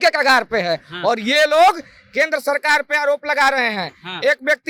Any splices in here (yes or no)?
no